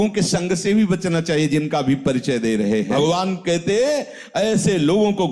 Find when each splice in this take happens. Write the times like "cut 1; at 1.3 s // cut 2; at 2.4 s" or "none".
cut 1; at 2.9 s